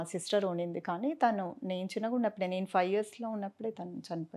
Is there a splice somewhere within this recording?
no; 0 cuts

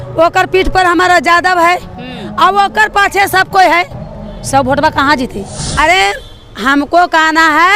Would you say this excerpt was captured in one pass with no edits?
no; 1 cut; at 5.8 s

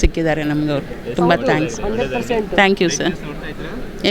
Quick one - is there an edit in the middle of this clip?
no; 0 cuts

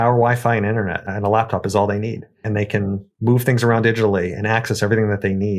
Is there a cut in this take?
yes; 2 cuts; at 1.1 s, 2.5 s

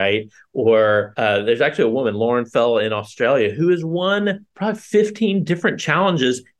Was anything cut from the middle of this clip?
no; 0 cuts

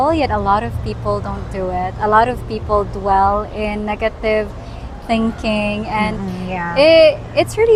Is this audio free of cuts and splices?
yes; 0 cuts

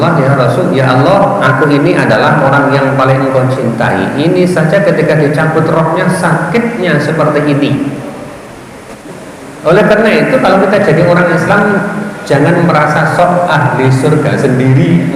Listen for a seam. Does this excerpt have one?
yes; 1 cut; at 9.0 s

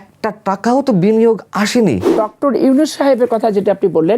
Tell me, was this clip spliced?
yes; 1 cut; at 2.1 s

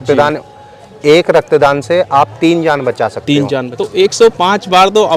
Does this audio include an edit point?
yes; 1 cut; at 3.7 s

